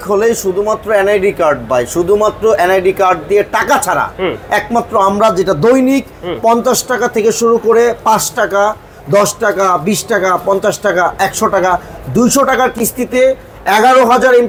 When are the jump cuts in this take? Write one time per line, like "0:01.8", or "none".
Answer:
none